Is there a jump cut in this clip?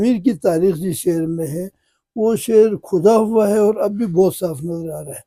no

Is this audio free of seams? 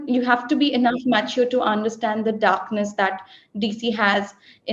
yes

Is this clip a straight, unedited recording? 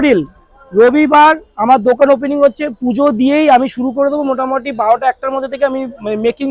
yes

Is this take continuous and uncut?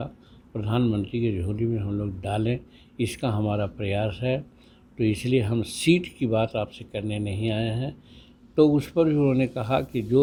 yes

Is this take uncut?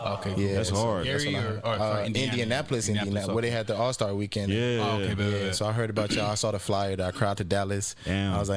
yes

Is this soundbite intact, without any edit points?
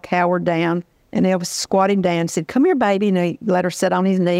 no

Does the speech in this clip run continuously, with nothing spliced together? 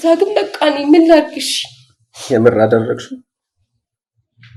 yes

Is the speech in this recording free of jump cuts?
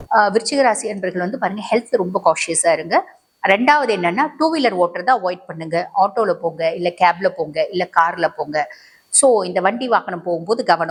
yes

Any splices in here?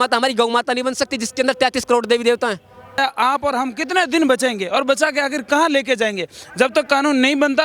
yes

